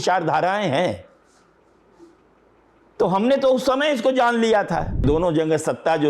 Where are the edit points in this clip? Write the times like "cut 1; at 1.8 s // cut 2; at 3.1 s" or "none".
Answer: cut 1; at 5.0 s